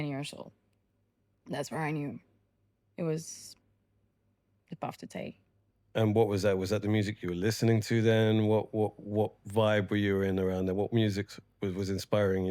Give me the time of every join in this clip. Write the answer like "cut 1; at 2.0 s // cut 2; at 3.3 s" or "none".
none